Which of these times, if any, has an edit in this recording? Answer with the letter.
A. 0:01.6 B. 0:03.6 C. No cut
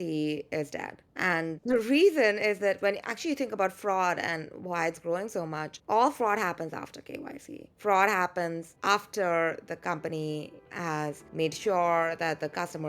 A